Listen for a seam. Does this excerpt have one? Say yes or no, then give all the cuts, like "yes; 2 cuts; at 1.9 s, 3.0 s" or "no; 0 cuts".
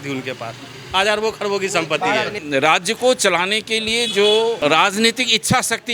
yes; 2 cuts; at 2.4 s, 4.6 s